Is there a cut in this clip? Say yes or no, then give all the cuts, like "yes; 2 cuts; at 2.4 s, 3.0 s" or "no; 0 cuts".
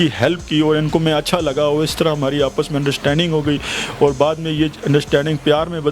no; 0 cuts